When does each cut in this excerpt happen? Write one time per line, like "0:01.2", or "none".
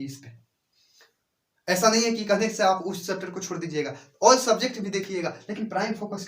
none